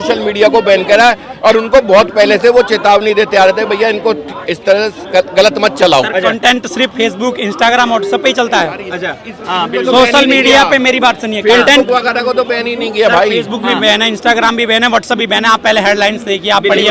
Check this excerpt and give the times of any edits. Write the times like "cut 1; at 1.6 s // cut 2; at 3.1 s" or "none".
none